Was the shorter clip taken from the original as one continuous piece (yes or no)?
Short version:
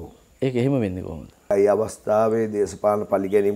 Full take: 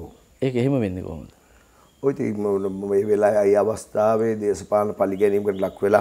no